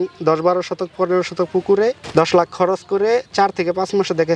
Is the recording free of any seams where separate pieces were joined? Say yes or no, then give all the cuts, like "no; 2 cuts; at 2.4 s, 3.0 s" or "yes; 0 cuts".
no; 1 cut; at 2.0 s